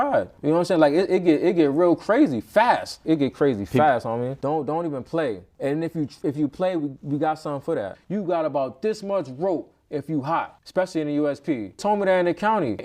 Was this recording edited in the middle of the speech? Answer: yes; 6 cuts; at 3.0 s, 4.3 s, 5.5 s, 8.0 s, 10.6 s, 11.8 s

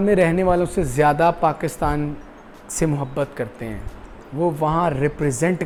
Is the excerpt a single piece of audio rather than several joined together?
yes; 0 cuts

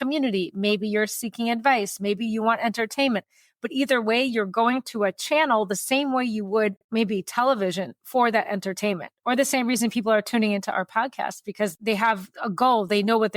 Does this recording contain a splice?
no; 0 cuts

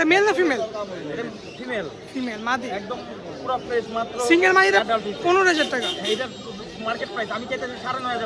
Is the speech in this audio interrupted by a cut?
no; 0 cuts

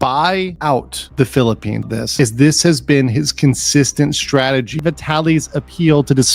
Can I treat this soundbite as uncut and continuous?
no; 2 cuts; at 1.8 s, 4.8 s

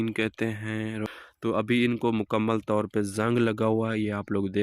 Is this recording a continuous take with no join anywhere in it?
no; 1 cut; at 1.0 s

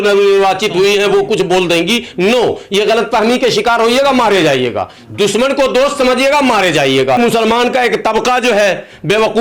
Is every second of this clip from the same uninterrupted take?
no; 1 cut; at 7.2 s

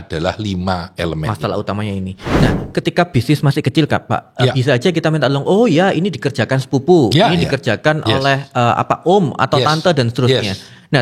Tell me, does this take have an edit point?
yes; 1 cut; at 2.3 s

